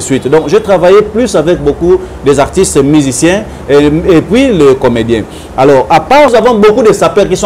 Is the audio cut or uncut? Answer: cut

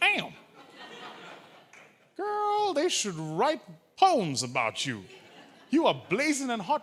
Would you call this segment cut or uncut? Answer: uncut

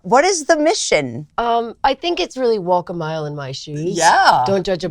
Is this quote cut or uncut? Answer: cut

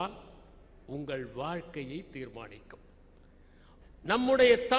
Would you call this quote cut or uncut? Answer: cut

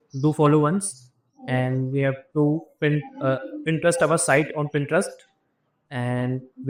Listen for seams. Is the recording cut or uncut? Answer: uncut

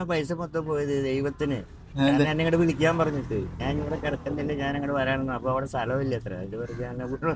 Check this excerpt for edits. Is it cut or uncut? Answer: uncut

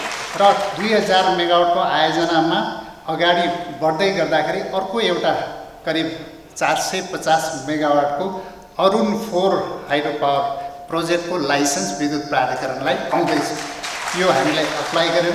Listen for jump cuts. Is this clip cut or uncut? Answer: uncut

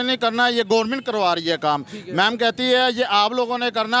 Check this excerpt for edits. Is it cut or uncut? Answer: uncut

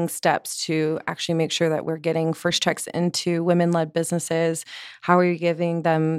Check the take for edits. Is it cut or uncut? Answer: uncut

